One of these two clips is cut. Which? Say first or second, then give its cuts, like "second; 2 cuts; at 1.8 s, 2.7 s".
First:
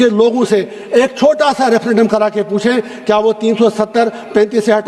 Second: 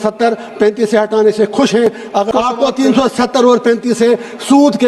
second; 1 cut; at 2.3 s